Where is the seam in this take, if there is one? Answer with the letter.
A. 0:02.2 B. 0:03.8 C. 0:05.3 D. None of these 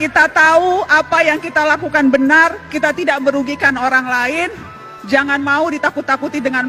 D